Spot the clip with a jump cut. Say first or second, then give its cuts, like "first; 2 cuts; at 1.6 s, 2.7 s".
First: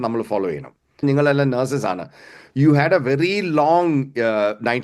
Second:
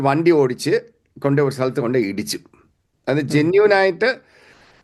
first; 1 cut; at 1.0 s